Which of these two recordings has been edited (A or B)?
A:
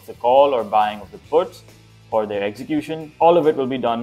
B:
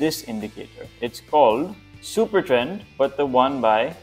A